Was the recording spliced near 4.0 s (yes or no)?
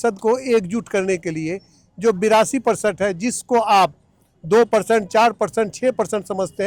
no